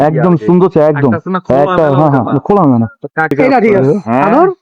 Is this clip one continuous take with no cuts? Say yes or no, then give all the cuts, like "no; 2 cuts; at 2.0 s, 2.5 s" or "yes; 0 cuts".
no; 1 cut; at 3.3 s